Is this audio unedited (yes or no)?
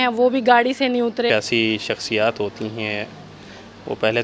no